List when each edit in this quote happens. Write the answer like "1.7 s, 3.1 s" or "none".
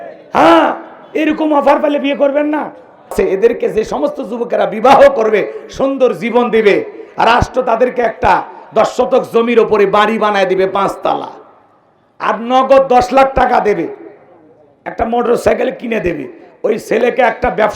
3.1 s